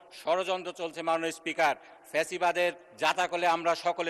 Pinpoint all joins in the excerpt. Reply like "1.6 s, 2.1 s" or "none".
none